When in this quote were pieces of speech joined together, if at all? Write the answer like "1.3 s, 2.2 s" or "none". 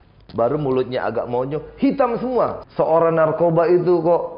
2.6 s